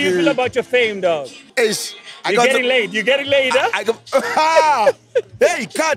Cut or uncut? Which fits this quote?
cut